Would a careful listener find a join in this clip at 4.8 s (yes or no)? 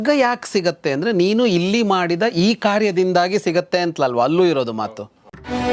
yes